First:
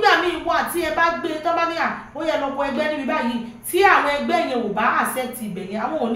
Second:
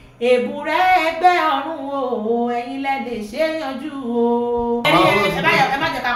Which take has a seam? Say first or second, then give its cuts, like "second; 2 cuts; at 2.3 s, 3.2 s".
second; 1 cut; at 4.8 s